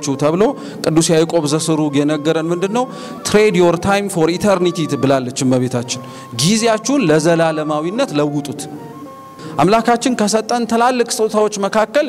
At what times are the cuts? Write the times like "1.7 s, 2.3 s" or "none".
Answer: 9.4 s